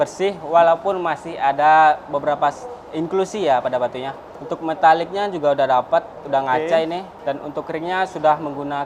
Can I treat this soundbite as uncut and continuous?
yes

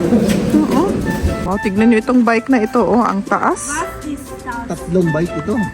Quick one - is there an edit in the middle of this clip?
yes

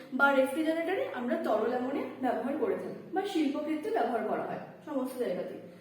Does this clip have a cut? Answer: no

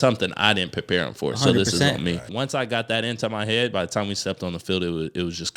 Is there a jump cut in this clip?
yes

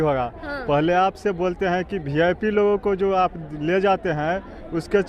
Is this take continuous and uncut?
yes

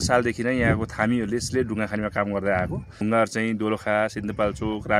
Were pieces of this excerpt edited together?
yes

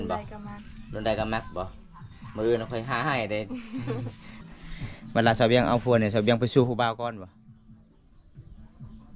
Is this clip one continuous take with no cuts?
no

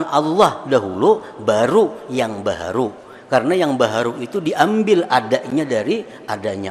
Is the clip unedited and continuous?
yes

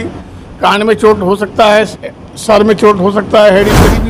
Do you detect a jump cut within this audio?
no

